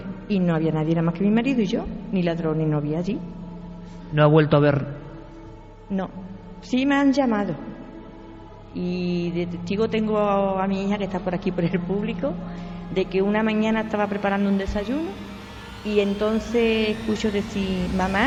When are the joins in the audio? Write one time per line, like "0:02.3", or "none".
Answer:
none

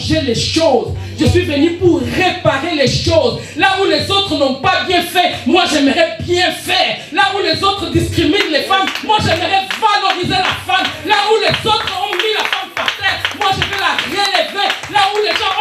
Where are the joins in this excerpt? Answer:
none

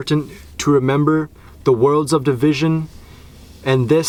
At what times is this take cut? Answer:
none

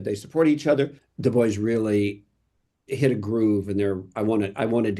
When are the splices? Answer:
0:01.0

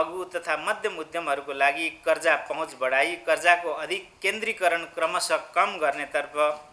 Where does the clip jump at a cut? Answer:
none

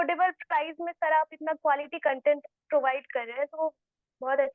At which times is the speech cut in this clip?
none

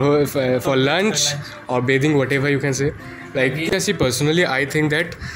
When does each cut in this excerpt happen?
0:03.7

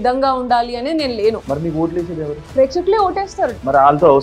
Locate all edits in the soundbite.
none

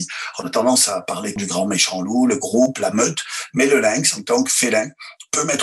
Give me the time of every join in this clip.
0:01.4

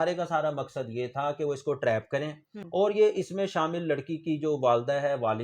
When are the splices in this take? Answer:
0:02.5

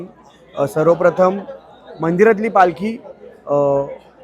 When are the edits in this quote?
none

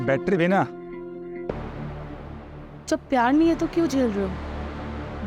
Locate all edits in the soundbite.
0:01.5

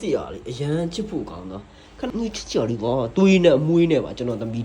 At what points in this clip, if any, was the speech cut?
0:02.1

